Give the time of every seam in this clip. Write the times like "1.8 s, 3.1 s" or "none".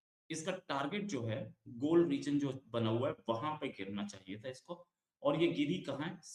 none